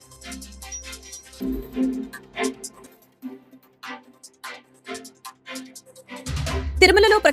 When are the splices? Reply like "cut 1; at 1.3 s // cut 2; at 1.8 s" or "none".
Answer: cut 1; at 1.1 s